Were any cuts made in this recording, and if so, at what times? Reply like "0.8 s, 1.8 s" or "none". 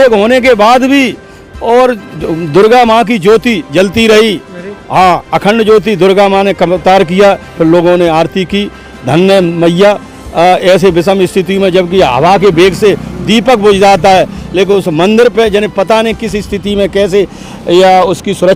none